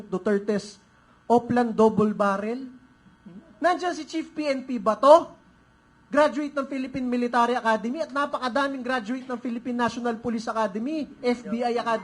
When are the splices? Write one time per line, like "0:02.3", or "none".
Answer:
none